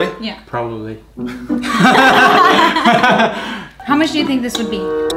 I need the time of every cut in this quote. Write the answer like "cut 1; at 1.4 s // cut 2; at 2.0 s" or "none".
cut 1; at 3.7 s